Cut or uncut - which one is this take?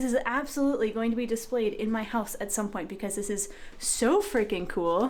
uncut